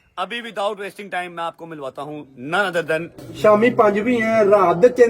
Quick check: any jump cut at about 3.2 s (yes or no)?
yes